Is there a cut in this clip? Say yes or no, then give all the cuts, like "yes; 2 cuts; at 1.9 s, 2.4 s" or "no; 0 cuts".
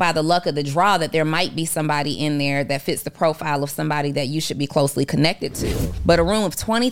yes; 1 cut; at 5.9 s